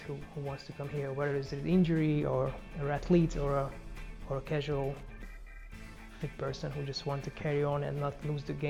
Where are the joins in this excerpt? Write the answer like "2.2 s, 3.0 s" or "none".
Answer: none